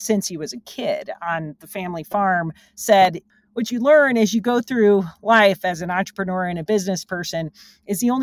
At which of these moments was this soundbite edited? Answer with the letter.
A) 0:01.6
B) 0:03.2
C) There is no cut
B